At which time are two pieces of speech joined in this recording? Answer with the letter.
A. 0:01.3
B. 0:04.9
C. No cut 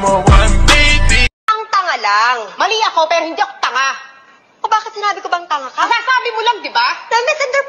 A